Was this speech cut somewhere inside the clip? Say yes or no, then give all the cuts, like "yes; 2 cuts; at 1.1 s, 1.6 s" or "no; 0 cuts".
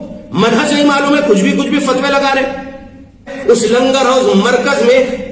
yes; 1 cut; at 3.3 s